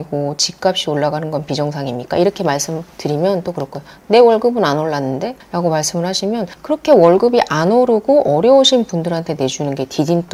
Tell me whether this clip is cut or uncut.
uncut